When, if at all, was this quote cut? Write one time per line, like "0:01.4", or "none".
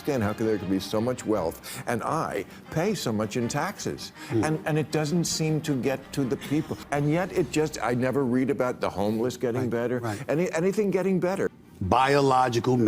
0:06.8
0:11.5